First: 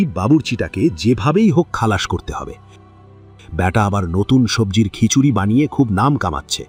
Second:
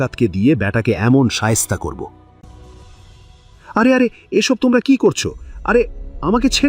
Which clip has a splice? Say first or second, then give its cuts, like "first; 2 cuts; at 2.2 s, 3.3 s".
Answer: second; 1 cut; at 2.4 s